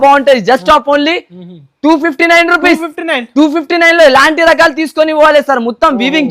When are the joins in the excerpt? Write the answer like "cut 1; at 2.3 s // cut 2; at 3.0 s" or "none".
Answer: none